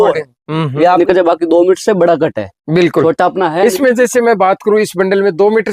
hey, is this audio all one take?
no; 1 cut; at 1.0 s

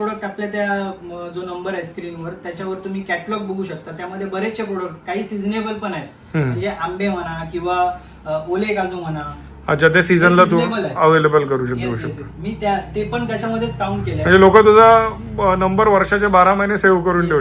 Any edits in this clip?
no; 0 cuts

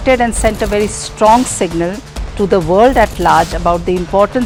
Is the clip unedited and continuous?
yes; 0 cuts

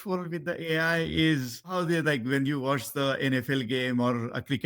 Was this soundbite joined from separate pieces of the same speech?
yes; 1 cut; at 1.7 s

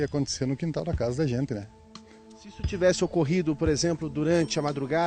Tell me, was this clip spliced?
no; 0 cuts

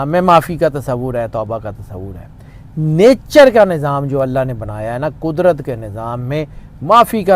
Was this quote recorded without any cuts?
yes; 0 cuts

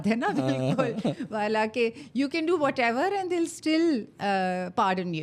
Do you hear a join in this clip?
no; 0 cuts

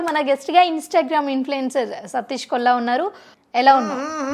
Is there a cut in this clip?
yes; 1 cut; at 3.2 s

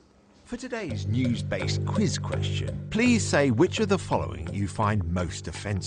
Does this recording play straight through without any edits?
no; 1 cut; at 2.6 s

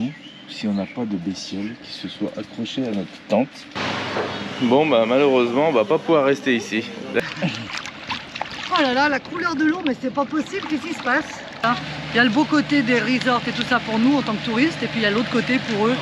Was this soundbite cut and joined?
yes; 3 cuts; at 3.6 s, 7.2 s, 11.5 s

